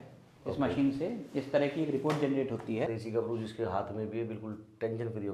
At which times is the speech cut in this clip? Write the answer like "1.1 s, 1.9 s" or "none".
2.9 s